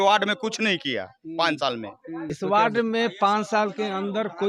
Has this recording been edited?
yes; 1 cut; at 2.3 s

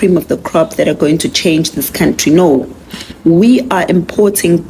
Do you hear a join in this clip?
no; 0 cuts

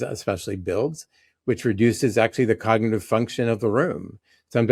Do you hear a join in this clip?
no; 0 cuts

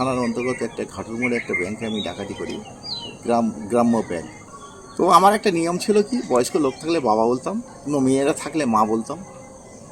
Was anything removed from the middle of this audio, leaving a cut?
yes; 2 cuts; at 4.5 s, 7.7 s

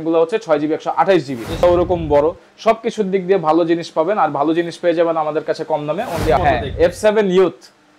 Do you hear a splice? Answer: yes; 2 cuts; at 1.6 s, 6.4 s

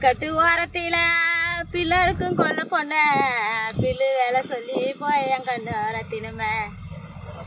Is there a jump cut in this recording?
no; 0 cuts

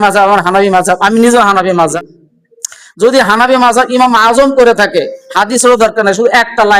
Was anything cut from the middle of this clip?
yes; 1 cut; at 1.9 s

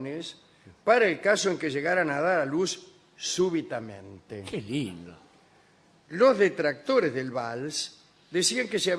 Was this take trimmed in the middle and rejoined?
yes; 1 cut; at 3.3 s

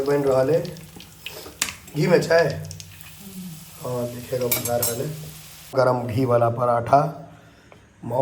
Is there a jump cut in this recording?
yes; 1 cut; at 5.7 s

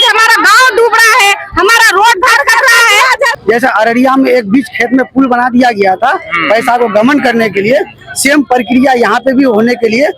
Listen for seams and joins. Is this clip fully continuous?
no; 1 cut; at 3.3 s

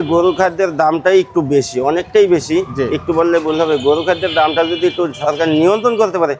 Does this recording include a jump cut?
no; 0 cuts

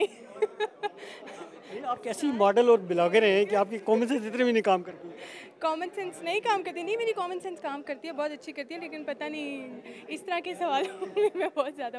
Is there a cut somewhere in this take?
no; 0 cuts

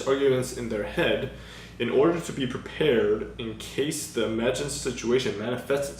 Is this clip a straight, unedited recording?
yes; 0 cuts

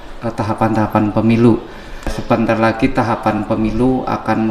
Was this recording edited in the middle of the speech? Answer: yes; 1 cut; at 2.2 s

